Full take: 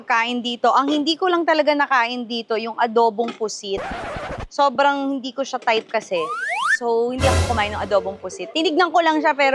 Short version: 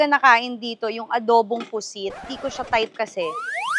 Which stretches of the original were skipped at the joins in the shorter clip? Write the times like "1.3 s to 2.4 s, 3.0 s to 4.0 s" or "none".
4.0 s to 5.3 s

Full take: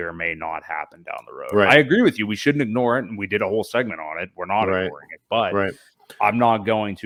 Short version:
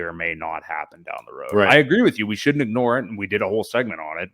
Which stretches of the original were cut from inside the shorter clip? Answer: none

